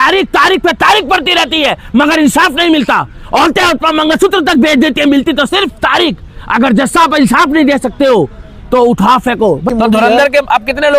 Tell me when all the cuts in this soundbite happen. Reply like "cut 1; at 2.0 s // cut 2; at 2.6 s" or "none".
cut 1; at 9.7 s